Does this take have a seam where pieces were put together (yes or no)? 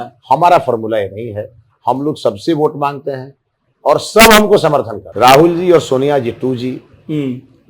yes